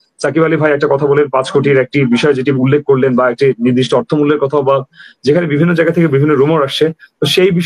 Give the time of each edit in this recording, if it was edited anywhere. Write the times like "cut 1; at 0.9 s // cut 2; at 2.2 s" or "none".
none